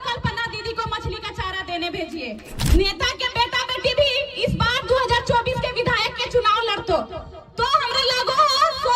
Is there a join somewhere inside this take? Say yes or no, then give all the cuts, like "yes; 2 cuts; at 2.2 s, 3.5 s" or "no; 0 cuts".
yes; 1 cut; at 2.5 s